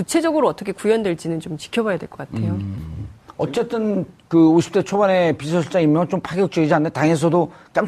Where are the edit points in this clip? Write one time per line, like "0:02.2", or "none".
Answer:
none